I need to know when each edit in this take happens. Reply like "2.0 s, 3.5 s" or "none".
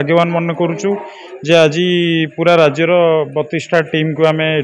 none